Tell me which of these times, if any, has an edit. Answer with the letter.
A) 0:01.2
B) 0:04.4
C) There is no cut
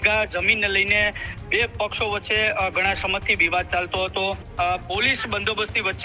B